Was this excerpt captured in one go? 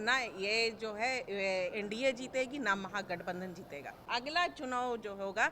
no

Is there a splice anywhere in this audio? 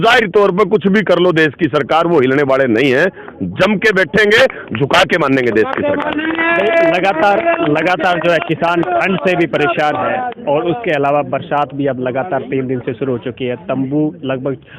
no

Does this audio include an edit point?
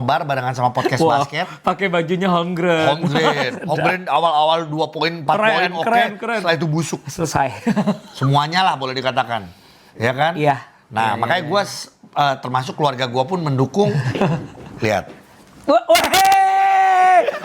no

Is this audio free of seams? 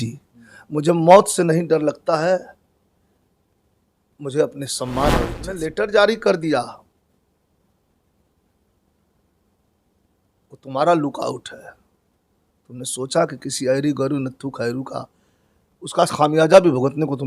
no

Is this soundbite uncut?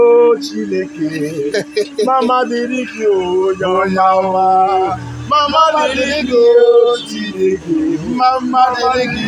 yes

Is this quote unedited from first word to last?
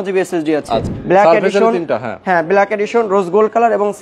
no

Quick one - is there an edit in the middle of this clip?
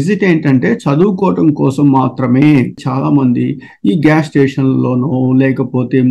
yes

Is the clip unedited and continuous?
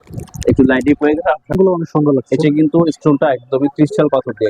no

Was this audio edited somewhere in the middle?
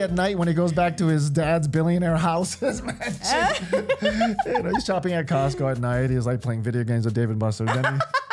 no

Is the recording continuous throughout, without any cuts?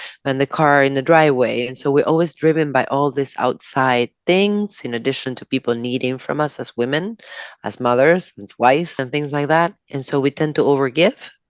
no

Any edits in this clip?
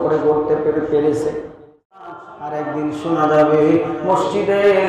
yes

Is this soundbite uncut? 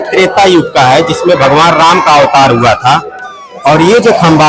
yes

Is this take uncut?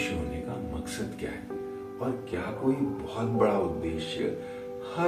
yes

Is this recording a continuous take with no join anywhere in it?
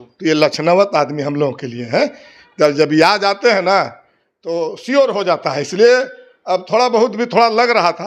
yes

